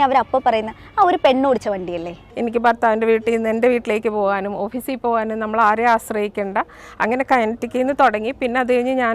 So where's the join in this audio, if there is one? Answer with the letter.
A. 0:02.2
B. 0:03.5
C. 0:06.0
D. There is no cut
A